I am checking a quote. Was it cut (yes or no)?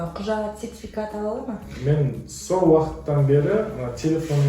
yes